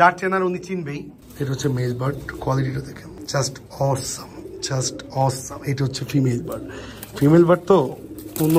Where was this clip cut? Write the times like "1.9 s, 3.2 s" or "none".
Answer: 1.2 s, 3.1 s